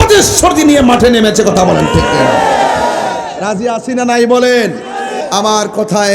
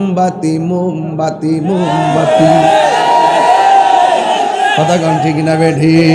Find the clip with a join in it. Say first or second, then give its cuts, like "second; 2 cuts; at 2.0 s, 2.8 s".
first; 1 cut; at 5.2 s